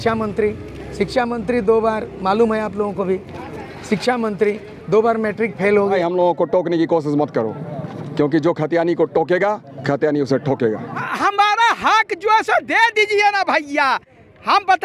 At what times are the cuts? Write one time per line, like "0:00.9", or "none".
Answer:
0:06.0
0:11.0